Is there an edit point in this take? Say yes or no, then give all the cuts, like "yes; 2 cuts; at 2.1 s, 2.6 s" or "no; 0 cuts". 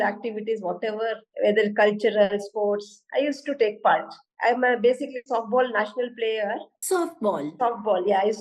yes; 2 cuts; at 1.2 s, 4.2 s